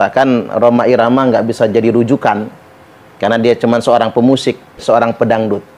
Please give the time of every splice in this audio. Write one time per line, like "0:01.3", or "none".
0:04.8